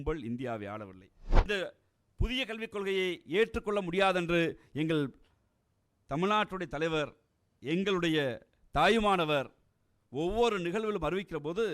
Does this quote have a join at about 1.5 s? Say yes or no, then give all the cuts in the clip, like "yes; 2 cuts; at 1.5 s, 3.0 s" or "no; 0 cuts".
yes; 1 cut; at 1.5 s